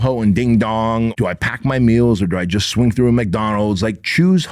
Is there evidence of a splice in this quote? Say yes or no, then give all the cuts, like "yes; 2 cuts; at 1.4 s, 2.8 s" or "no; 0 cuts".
yes; 1 cut; at 1.1 s